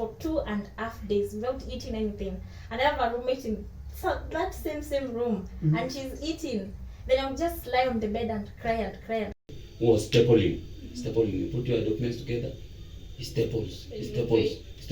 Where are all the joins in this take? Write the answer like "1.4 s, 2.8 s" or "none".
9.5 s